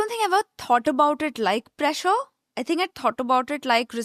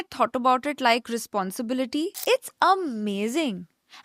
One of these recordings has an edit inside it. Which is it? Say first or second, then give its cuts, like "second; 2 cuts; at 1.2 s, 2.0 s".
second; 1 cut; at 2.2 s